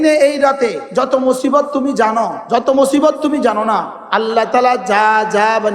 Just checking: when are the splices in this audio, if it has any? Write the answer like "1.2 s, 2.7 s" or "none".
0.8 s, 2.4 s, 4.0 s

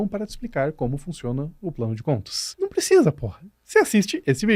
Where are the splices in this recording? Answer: 2.4 s

